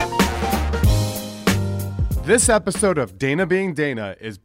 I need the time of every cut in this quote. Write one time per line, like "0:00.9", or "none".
0:02.1